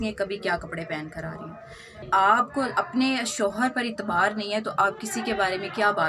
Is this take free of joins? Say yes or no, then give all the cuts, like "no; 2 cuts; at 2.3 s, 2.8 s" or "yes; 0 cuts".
no; 1 cut; at 1.9 s